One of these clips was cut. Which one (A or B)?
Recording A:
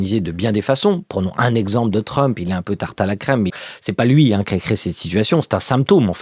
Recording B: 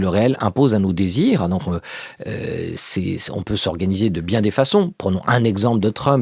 A